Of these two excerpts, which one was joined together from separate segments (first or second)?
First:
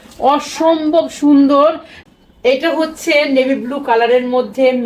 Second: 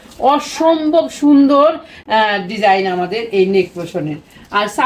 first